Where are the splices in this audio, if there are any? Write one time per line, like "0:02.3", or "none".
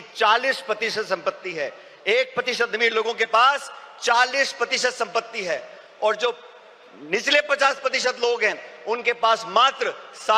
none